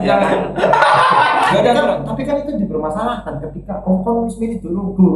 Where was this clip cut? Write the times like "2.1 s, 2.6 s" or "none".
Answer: 1.5 s